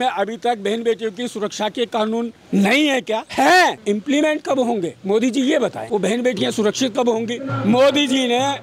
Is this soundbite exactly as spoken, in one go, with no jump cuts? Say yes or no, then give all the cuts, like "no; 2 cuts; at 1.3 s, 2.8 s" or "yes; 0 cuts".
no; 5 cuts; at 2.4 s, 3.3 s, 3.8 s, 5.8 s, 7.4 s